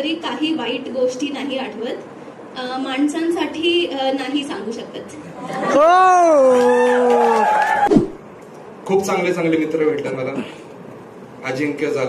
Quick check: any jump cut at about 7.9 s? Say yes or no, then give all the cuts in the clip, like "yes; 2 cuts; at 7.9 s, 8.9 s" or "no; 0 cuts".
yes; 1 cut; at 7.9 s